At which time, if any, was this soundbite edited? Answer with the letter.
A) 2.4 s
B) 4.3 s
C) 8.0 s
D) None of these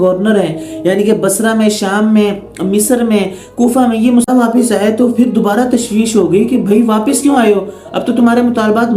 B